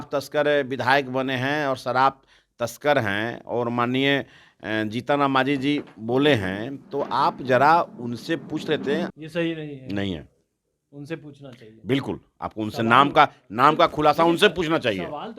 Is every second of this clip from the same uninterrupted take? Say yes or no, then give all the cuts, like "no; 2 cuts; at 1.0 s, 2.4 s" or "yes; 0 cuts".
no; 1 cut; at 9.1 s